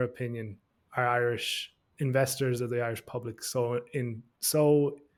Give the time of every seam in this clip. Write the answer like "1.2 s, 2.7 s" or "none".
none